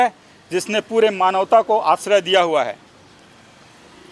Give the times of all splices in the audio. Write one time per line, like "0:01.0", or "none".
none